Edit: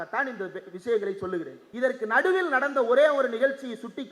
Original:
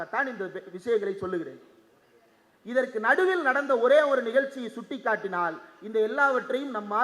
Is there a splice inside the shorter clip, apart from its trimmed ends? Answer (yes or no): yes